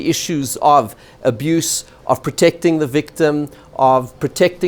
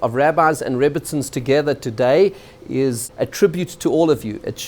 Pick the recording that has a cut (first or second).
second